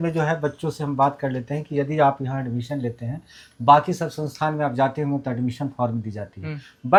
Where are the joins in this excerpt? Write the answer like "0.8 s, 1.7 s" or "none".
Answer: none